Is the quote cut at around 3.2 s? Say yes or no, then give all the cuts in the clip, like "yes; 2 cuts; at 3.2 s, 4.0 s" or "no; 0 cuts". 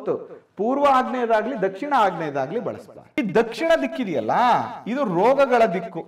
yes; 1 cut; at 3.2 s